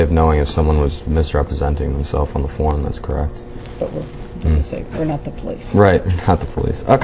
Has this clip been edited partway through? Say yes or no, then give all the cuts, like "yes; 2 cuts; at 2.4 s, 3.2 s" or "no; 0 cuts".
no; 0 cuts